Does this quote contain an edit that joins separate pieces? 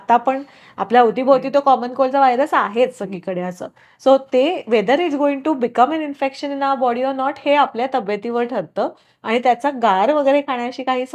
no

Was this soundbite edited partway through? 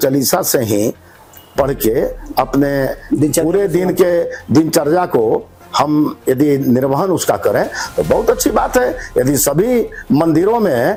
no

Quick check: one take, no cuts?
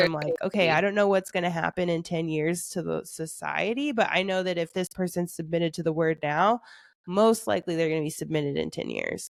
yes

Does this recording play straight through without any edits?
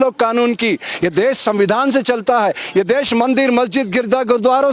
yes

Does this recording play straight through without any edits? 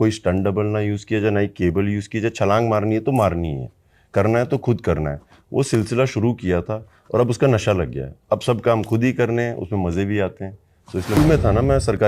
no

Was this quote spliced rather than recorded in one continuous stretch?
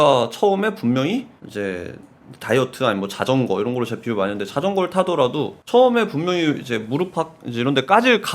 yes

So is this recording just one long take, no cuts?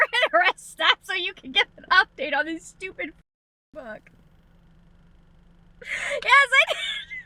yes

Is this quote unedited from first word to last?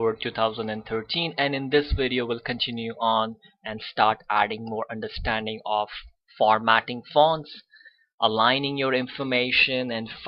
yes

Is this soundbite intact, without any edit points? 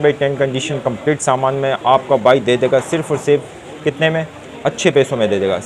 yes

